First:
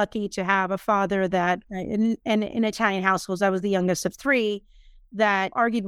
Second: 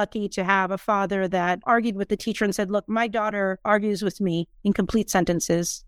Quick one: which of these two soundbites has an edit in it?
second; 1 cut; at 1.6 s

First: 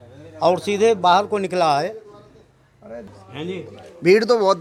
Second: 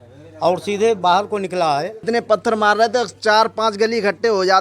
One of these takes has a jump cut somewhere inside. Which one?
second; 1 cut; at 2.0 s

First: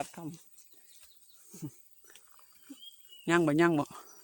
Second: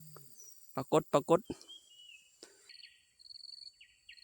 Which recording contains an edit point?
second; 1 cut; at 2.7 s

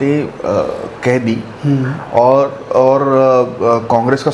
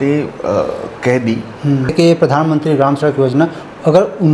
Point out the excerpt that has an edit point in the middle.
second; 1 cut; at 1.9 s

